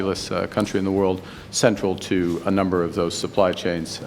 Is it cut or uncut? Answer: uncut